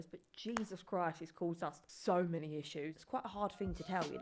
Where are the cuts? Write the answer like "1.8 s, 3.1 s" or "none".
2.9 s